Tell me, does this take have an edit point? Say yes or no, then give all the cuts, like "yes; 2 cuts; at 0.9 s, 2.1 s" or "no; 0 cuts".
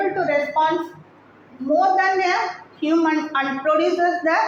no; 0 cuts